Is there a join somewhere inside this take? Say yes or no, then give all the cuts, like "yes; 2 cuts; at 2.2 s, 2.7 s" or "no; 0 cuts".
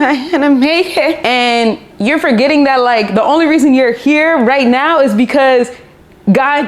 no; 0 cuts